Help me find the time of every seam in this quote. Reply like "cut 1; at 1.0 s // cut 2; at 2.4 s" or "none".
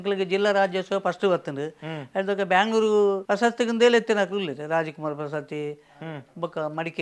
cut 1; at 3.2 s